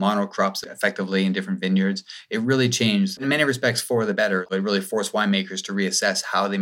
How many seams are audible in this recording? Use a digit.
2